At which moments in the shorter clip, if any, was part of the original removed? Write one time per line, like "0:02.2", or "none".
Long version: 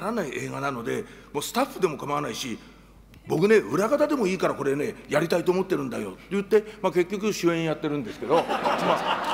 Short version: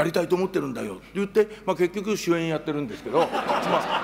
none